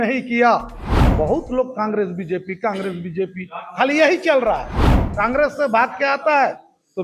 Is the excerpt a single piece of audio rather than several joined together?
no; 2 cuts; at 1.0 s, 4.8 s

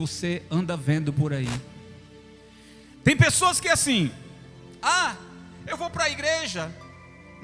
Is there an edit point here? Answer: no; 0 cuts

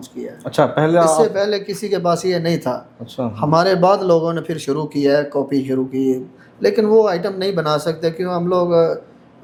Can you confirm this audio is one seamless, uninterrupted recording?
yes; 0 cuts

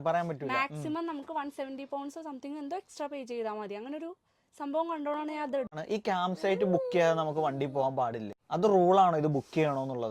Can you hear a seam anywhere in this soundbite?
yes; 2 cuts; at 5.8 s, 8.3 s

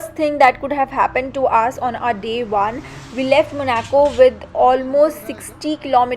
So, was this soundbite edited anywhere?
no; 0 cuts

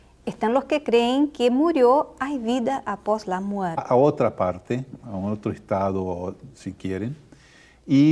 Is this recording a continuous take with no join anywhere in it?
yes; 0 cuts

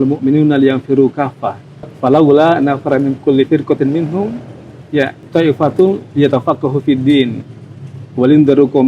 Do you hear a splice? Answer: yes; 2 cuts; at 1.9 s, 5.2 s

